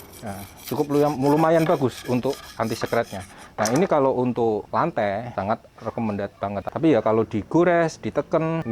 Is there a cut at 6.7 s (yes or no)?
yes